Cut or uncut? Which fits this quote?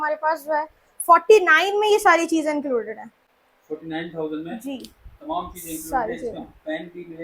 uncut